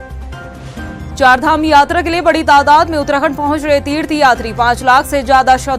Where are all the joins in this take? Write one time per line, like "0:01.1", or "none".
0:01.0